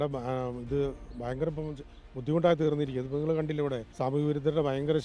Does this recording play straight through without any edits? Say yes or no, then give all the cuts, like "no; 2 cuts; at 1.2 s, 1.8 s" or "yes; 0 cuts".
no; 1 cut; at 3.9 s